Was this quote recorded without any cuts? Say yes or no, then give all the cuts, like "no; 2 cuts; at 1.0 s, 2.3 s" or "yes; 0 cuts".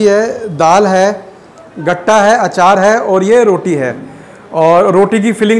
yes; 0 cuts